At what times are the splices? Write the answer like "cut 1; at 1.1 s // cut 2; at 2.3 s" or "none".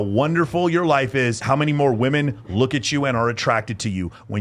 cut 1; at 1.4 s